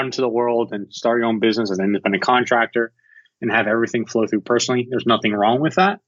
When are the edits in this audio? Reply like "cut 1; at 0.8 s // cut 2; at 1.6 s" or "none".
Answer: none